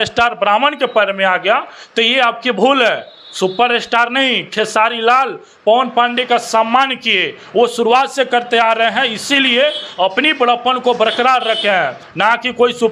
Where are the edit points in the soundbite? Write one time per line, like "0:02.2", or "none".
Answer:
none